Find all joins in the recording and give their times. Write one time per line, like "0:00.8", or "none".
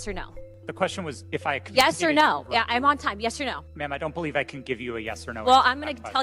0:03.7